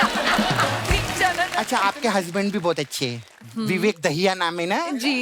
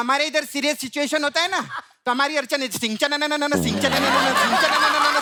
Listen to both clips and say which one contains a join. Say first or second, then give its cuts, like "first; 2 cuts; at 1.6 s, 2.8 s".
first; 1 cut; at 1.6 s